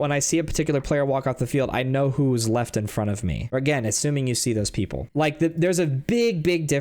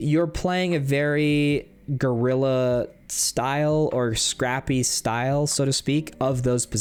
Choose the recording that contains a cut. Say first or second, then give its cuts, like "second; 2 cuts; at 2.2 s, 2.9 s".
first; 2 cuts; at 3.4 s, 5.0 s